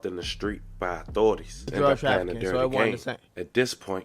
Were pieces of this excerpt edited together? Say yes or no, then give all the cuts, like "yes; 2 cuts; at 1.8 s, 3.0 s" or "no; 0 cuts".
yes; 1 cut; at 1.7 s